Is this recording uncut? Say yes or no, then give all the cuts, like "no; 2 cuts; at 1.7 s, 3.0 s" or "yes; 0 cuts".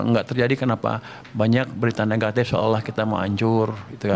yes; 0 cuts